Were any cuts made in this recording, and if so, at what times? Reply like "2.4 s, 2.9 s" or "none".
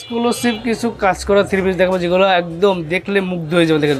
none